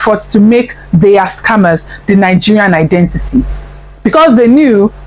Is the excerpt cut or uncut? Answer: uncut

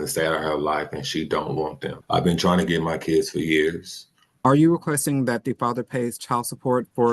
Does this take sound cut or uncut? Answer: cut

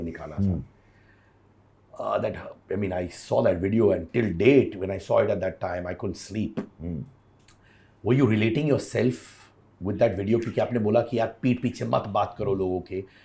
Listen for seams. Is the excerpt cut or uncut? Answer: uncut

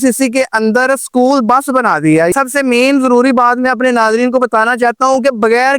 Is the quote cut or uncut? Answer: cut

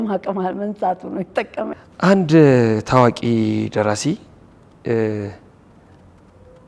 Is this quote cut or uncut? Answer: cut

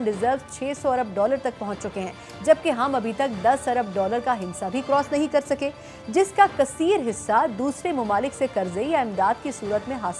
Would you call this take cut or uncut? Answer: uncut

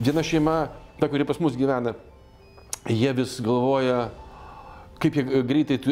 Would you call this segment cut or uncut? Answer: uncut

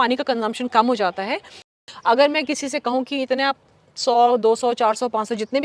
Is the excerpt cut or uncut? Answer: cut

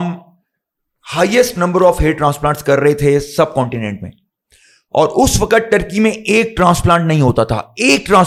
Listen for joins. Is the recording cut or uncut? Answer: uncut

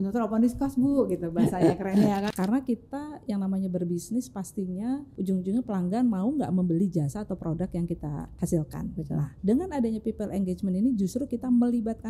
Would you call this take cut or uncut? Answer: cut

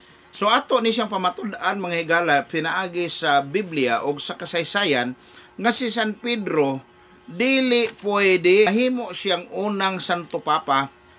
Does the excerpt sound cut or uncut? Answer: cut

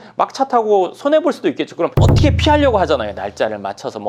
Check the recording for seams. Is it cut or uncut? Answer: cut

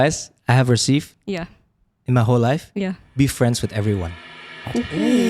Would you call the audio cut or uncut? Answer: uncut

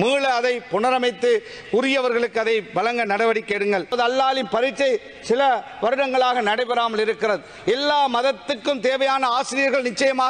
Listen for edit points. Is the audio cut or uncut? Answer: cut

